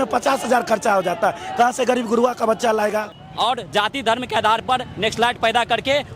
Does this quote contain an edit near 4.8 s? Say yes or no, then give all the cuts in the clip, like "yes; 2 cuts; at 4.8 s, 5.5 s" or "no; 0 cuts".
no; 1 cut; at 3.2 s